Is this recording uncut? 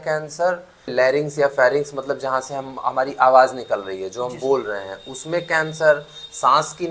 no; 1 cut; at 0.9 s

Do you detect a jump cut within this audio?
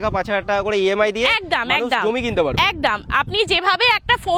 no; 0 cuts

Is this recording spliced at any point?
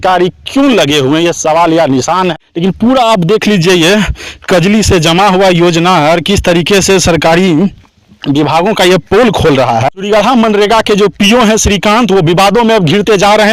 yes; 2 cuts; at 2.3 s, 10.0 s

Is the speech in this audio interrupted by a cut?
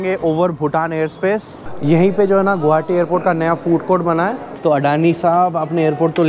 yes; 2 cuts; at 1.7 s, 4.5 s

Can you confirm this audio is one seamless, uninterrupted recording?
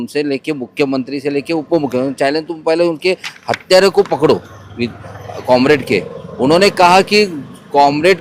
yes; 0 cuts

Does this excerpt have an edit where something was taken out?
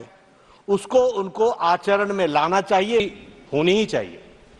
yes; 1 cut; at 3.0 s

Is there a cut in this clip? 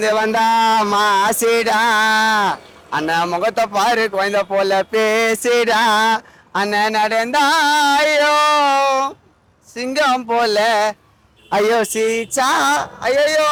no; 0 cuts

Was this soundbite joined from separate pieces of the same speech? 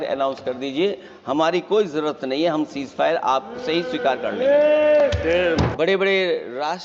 yes; 1 cut; at 5.7 s

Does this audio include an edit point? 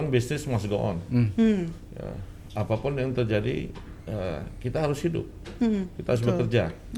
no; 0 cuts

